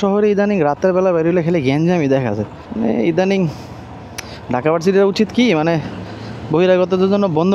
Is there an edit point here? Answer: yes; 1 cut; at 2.6 s

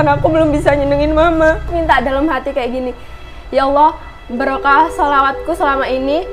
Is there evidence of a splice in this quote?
yes; 1 cut; at 1.7 s

